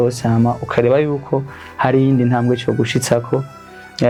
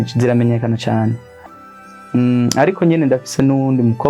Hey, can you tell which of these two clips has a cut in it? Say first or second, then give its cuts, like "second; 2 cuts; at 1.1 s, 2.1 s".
second; 1 cut; at 1.3 s